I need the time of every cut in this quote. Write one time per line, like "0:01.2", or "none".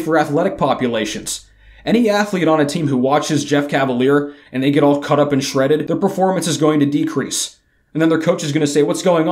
0:05.8